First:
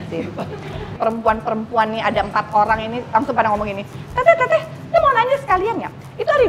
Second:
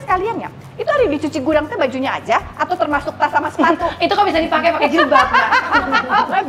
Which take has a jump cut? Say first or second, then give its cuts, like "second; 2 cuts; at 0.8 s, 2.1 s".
first; 1 cut; at 1.0 s